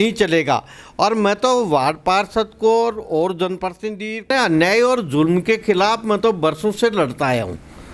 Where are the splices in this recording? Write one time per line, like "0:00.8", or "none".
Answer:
0:04.3